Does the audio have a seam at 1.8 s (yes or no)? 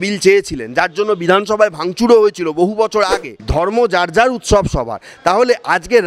no